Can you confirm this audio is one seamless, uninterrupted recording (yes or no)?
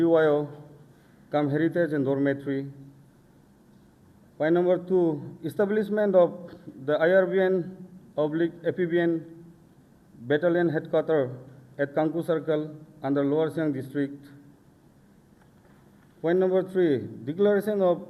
yes